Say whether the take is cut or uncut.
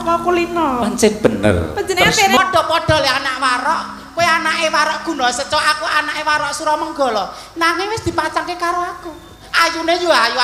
cut